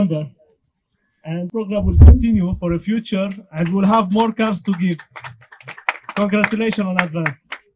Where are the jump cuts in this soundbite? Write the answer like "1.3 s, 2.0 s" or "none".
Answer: 1.5 s

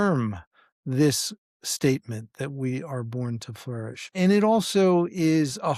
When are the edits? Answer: none

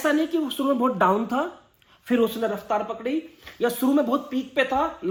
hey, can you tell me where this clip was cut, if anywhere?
none

